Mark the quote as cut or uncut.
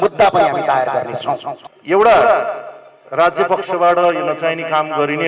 cut